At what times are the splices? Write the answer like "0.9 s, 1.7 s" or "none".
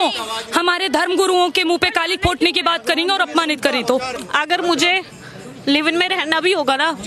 4.2 s